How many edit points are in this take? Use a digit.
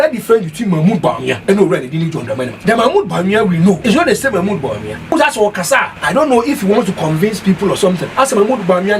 6